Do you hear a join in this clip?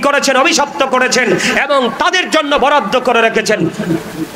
no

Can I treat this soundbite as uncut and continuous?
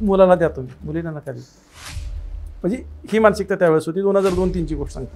yes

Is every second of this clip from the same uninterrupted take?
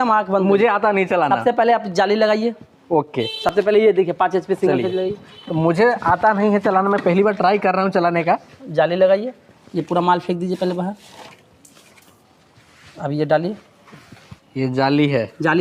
yes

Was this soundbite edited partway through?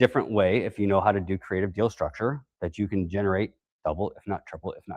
no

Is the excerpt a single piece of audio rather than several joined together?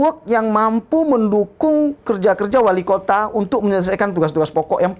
yes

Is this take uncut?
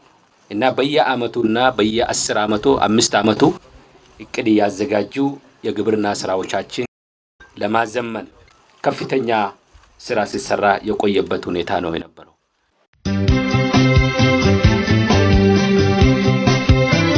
no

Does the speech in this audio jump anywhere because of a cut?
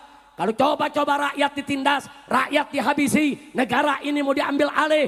no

